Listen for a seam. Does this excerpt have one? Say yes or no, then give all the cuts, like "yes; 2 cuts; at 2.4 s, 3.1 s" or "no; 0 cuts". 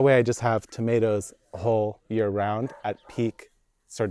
no; 0 cuts